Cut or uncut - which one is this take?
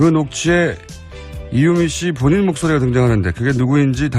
uncut